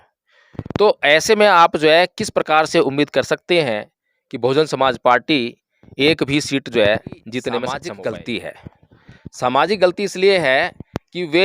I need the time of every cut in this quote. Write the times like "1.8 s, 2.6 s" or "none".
7.8 s